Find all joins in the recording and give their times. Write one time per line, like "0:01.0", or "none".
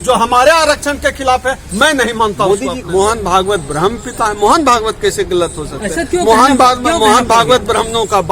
0:02.8